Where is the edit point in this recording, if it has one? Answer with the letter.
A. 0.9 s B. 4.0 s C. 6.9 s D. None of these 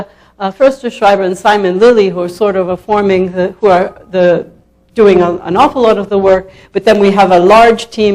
B